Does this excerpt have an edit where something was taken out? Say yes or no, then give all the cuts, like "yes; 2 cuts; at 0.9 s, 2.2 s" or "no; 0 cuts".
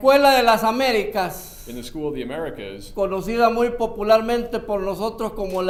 no; 0 cuts